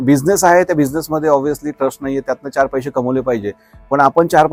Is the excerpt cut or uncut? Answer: uncut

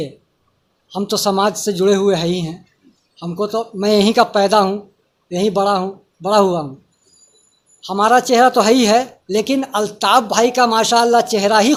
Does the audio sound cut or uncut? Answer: uncut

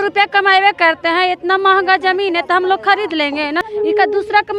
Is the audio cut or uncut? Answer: cut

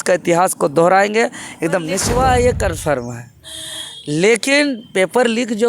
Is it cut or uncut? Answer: cut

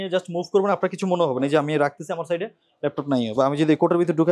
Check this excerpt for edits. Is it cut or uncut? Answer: uncut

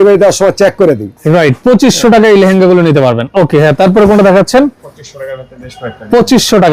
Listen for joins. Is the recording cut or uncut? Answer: uncut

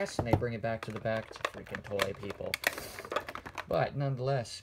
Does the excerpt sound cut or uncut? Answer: cut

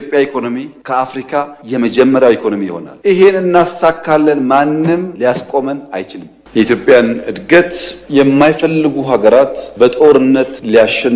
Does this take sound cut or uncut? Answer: uncut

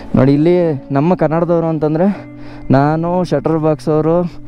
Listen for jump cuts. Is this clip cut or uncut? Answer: uncut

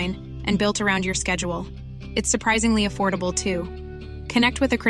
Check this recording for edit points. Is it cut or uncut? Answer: uncut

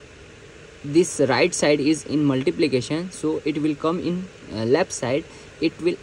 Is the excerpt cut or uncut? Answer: uncut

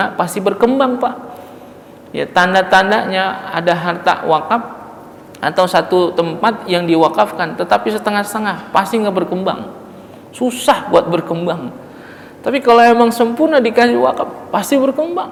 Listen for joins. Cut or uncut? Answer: uncut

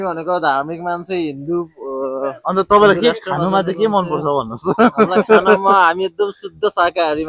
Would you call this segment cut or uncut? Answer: uncut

